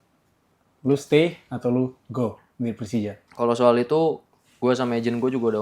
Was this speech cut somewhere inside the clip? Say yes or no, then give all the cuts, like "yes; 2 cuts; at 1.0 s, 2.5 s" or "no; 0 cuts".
yes; 1 cut; at 3.2 s